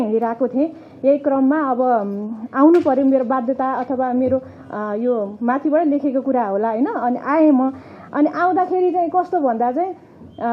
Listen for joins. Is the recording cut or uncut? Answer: uncut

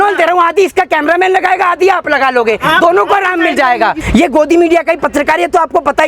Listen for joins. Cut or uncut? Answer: cut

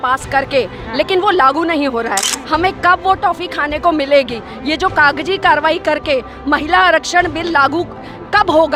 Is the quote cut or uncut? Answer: uncut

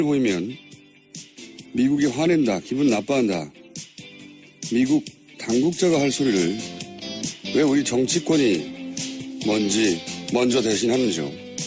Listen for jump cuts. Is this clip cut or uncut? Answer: uncut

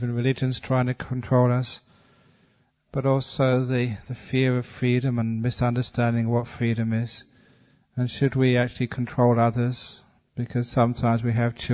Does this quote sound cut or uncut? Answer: uncut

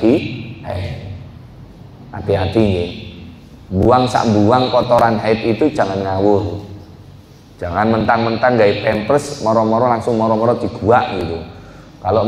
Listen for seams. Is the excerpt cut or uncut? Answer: uncut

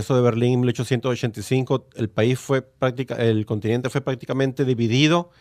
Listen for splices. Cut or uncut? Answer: cut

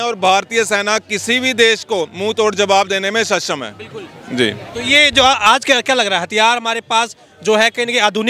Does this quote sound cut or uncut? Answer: uncut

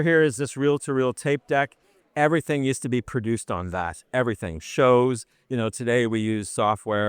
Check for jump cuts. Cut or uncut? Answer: cut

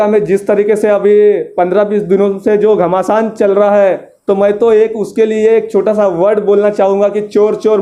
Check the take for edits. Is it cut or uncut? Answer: uncut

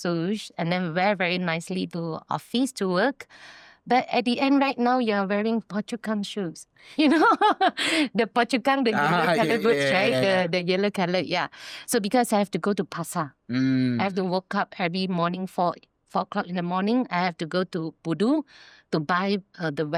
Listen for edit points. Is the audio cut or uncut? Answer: uncut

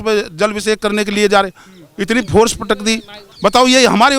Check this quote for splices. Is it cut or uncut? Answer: cut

